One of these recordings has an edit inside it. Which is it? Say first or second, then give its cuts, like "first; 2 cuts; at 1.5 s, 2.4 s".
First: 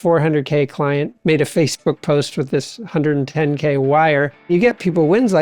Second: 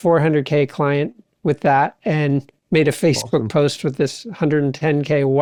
first; 2 cuts; at 1.1 s, 4.5 s